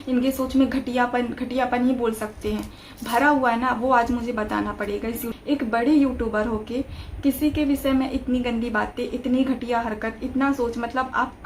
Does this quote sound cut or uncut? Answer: cut